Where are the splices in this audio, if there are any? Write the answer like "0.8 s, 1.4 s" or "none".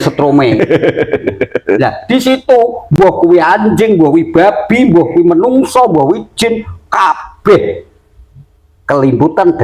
none